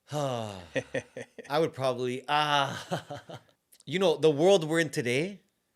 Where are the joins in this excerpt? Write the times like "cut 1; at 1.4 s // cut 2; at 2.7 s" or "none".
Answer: none